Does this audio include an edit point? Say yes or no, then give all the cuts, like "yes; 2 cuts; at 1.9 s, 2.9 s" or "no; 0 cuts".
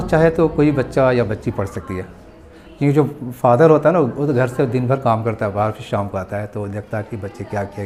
no; 0 cuts